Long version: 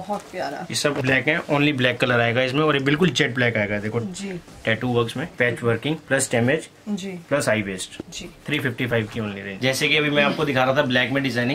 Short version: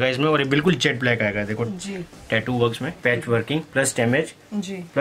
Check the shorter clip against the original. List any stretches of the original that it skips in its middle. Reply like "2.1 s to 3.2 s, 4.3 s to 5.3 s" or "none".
none